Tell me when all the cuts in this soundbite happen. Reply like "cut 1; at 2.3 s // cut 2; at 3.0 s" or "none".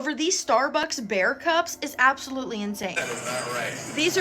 cut 1; at 3.0 s